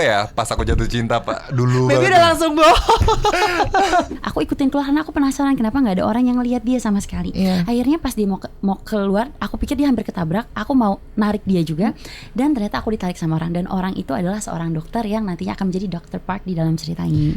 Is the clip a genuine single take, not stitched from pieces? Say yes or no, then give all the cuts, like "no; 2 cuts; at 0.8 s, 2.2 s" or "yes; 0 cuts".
no; 1 cut; at 4.1 s